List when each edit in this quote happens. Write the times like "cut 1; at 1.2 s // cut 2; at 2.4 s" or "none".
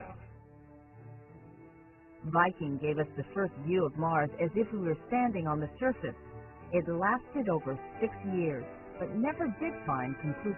none

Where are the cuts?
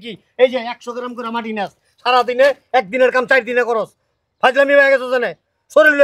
none

